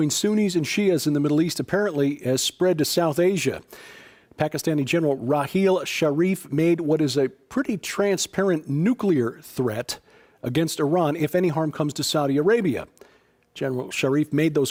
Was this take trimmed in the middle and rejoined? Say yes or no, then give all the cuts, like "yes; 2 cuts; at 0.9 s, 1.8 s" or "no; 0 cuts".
no; 0 cuts